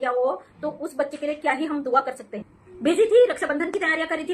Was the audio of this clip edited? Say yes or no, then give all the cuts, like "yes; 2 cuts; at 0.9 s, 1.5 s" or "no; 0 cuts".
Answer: no; 0 cuts